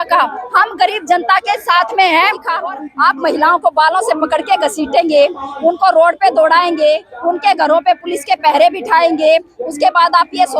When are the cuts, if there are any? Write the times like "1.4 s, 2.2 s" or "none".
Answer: 2.5 s